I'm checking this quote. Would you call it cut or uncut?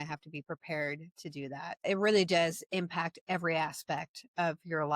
cut